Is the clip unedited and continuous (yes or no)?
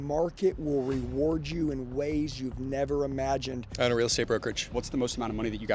no